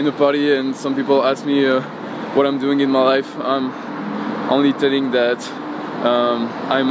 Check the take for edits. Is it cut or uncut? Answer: uncut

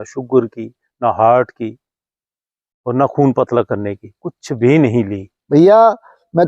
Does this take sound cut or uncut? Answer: cut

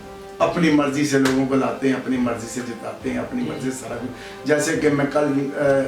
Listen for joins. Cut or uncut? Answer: uncut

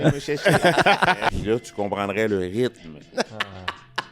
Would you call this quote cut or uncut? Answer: cut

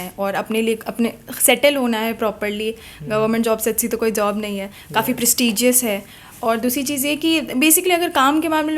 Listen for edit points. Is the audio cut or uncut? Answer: uncut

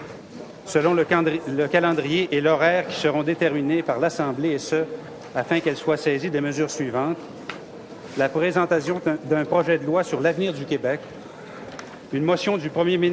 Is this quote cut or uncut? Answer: uncut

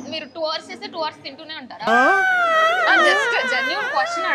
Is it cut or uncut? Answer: uncut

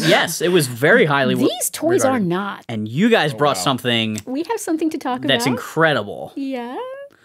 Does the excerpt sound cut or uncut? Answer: cut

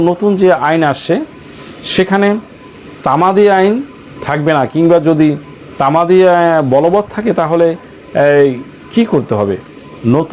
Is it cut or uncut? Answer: uncut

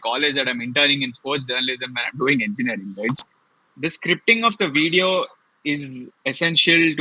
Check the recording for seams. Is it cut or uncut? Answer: cut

